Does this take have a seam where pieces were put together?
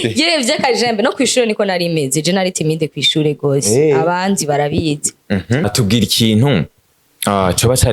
yes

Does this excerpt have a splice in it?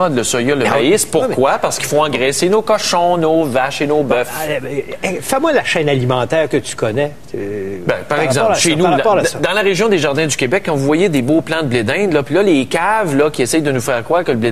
yes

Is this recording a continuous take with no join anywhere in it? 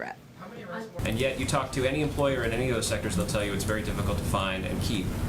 no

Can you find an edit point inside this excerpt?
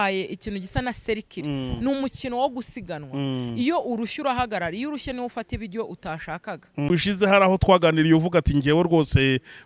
yes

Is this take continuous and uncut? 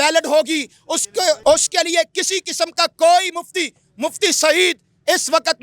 no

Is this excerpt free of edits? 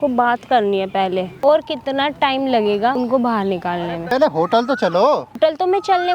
no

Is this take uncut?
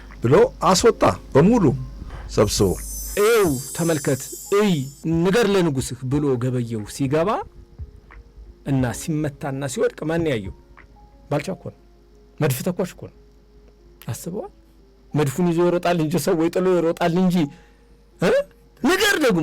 no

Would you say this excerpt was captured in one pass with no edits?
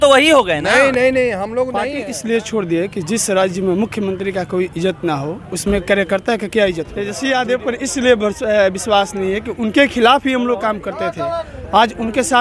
no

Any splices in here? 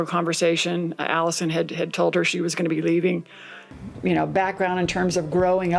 yes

